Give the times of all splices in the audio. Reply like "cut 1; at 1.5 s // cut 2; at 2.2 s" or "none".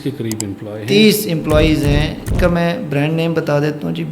cut 1; at 2.4 s